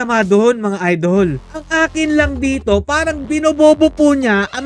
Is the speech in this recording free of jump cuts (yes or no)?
no